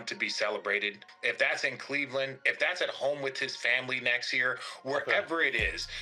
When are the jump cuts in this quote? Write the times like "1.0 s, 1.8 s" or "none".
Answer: 1.0 s